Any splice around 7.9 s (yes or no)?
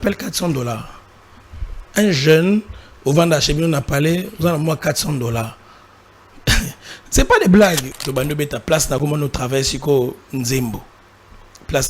yes